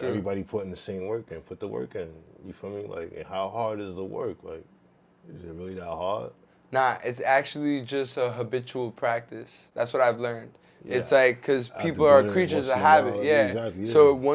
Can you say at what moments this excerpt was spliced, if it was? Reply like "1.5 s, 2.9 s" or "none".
none